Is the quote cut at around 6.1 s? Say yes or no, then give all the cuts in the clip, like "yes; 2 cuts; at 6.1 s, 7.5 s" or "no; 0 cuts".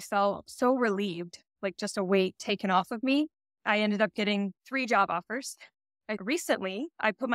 yes; 1 cut; at 6.1 s